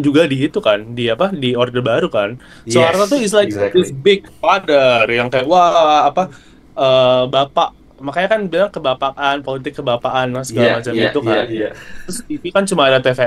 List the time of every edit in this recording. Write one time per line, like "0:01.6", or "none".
none